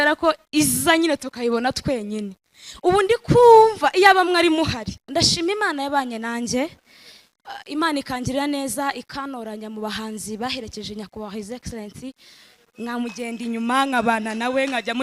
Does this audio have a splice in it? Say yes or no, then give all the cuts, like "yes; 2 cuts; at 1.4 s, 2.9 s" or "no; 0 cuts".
yes; 1 cut; at 5.0 s